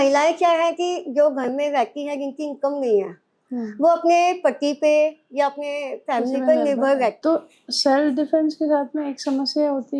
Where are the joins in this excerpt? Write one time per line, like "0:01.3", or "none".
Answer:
0:07.2